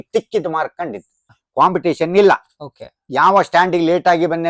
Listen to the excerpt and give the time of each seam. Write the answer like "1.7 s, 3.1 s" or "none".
1.3 s